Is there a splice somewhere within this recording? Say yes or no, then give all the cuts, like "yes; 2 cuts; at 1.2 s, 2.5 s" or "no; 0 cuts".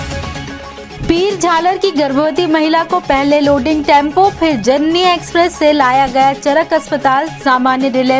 yes; 1 cut; at 0.9 s